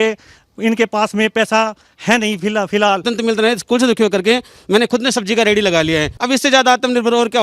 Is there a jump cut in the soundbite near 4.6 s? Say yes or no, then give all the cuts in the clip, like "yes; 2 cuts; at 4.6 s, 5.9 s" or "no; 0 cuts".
no; 2 cuts; at 3.1 s, 6.1 s